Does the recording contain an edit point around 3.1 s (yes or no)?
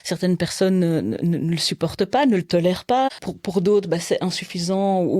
yes